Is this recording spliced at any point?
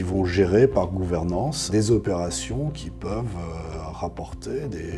yes; 1 cut; at 1.6 s

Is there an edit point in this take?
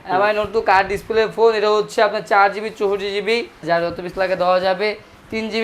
yes; 1 cut; at 3.6 s

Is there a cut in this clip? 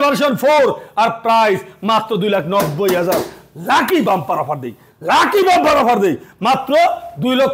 no; 0 cuts

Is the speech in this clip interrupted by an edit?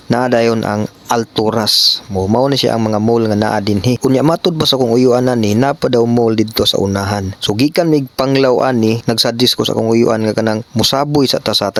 no; 0 cuts

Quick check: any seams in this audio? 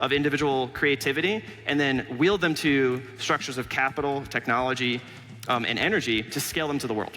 no; 0 cuts

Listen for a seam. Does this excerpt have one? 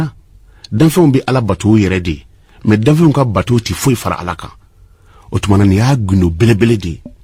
no; 0 cuts

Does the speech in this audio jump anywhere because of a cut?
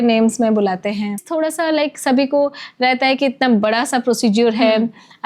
yes; 1 cut; at 1.3 s

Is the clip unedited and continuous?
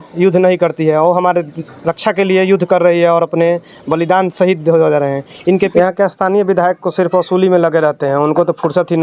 no; 1 cut; at 5.7 s

